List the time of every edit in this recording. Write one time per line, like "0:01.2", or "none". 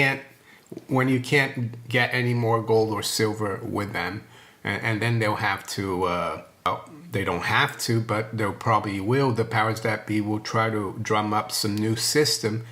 0:06.7